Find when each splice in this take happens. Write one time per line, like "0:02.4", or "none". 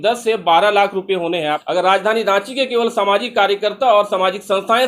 0:01.6